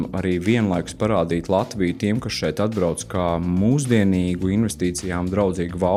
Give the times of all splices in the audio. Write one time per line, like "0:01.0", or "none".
none